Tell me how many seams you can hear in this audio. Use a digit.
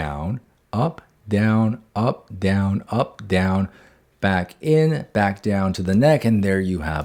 0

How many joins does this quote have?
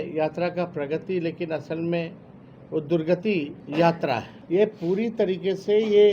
2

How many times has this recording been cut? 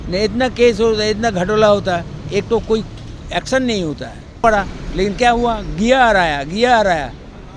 1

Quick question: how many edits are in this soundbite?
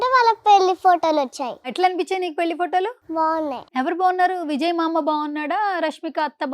2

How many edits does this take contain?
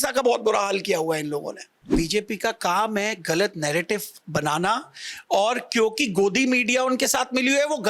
1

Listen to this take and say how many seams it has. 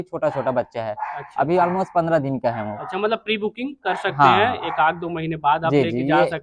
0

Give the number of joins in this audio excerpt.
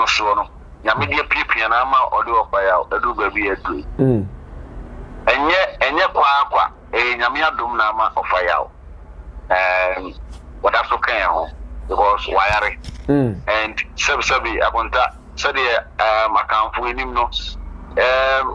0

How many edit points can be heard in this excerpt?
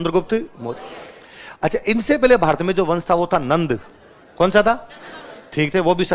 0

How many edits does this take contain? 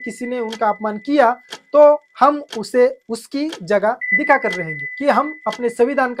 1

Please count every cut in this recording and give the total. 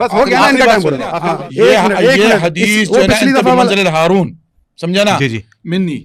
1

